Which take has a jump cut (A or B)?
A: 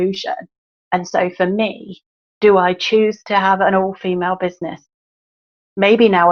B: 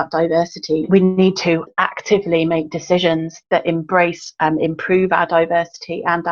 B